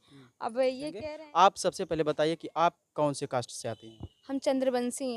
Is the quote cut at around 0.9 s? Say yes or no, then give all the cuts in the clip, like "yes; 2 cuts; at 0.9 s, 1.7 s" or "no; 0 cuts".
yes; 1 cut; at 0.9 s